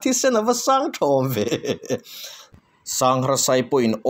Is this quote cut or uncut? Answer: cut